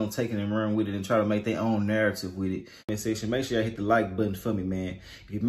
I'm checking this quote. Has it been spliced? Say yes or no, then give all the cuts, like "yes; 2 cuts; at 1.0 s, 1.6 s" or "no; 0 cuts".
yes; 1 cut; at 2.9 s